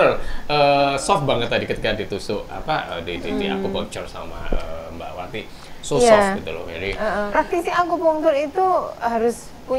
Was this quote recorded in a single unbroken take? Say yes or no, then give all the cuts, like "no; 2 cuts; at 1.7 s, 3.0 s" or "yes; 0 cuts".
no; 1 cut; at 7.2 s